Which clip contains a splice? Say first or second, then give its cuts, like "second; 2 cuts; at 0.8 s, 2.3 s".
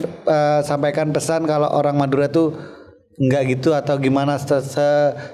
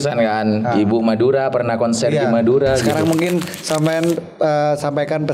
second; 1 cut; at 2.9 s